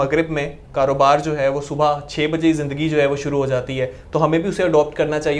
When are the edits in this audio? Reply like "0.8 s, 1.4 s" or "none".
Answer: none